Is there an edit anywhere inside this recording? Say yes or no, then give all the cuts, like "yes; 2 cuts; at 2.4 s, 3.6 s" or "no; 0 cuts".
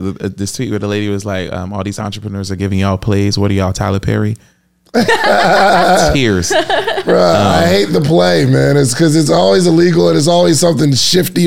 no; 0 cuts